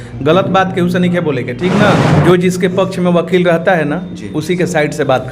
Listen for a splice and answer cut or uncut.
cut